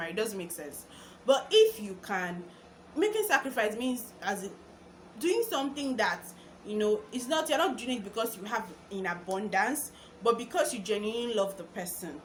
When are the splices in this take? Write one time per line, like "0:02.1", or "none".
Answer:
none